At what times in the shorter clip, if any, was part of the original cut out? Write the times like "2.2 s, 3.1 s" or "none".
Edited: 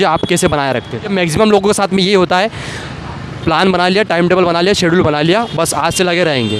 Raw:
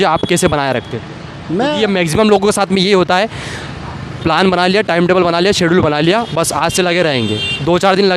1.1 s